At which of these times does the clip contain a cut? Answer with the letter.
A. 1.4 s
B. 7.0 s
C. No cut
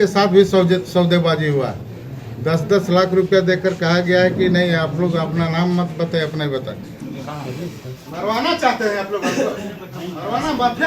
B